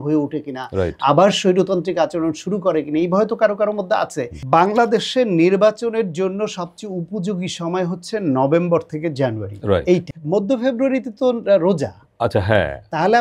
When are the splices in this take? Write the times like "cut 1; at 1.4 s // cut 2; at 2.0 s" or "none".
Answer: cut 1; at 4.3 s // cut 2; at 10.1 s